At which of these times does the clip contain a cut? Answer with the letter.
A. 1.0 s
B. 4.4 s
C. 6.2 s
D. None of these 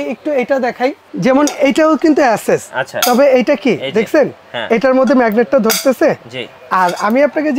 A